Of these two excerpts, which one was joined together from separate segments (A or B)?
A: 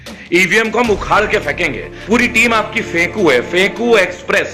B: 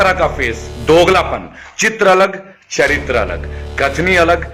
A